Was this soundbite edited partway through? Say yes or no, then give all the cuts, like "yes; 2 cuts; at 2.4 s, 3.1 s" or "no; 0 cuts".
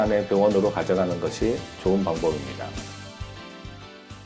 no; 0 cuts